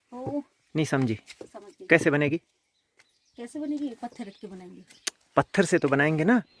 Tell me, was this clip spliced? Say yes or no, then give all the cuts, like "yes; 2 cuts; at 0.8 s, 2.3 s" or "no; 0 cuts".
no; 0 cuts